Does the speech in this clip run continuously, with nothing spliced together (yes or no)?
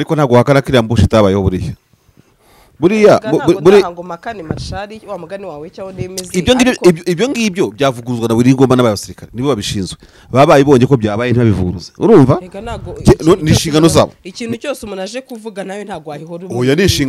yes